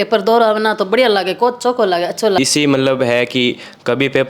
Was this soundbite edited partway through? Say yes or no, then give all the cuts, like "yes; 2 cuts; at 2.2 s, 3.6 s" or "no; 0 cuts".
yes; 1 cut; at 2.4 s